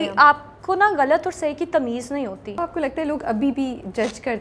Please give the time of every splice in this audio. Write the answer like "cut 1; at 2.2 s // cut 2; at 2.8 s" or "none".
cut 1; at 2.6 s